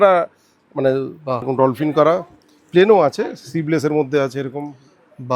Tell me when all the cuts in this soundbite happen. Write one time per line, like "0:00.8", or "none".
0:01.4